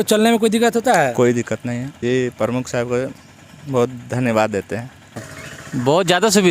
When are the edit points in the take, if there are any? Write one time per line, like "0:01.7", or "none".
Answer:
0:01.9
0:05.3